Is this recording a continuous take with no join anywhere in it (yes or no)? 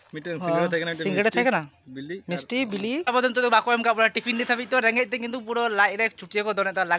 no